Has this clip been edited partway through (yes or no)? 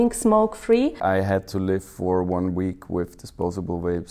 yes